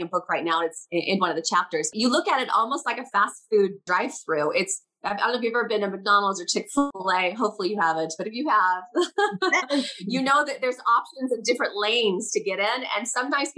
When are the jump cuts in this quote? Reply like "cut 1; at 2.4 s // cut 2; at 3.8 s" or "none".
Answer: cut 1; at 1.9 s // cut 2; at 3.9 s // cut 3; at 6.9 s